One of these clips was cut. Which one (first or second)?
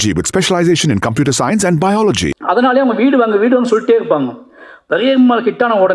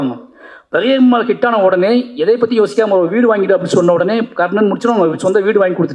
first